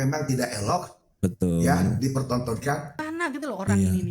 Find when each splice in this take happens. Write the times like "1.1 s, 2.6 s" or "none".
3.0 s